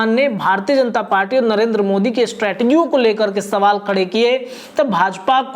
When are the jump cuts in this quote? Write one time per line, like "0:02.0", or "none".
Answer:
none